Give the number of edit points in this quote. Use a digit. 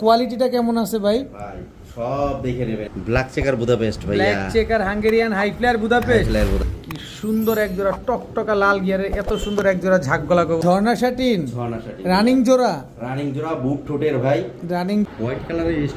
4